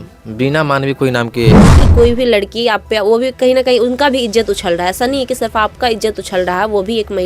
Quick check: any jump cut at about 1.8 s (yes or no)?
yes